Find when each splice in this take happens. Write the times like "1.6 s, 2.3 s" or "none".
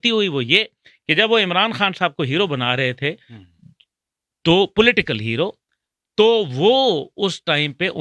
none